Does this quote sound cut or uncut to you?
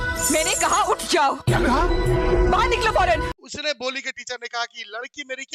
cut